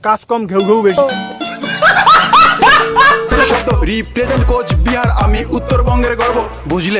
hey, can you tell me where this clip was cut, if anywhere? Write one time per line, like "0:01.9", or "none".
0:01.2
0:03.4